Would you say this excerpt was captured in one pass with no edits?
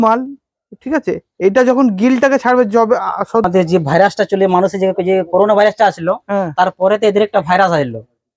no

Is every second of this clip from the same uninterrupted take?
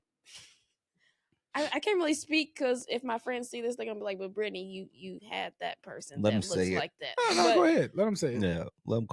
yes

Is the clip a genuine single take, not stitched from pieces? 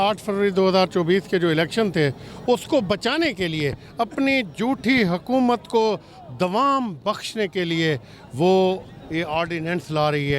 yes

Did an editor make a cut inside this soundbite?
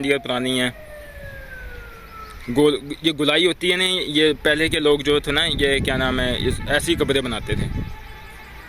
no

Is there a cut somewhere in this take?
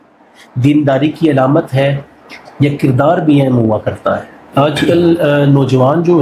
yes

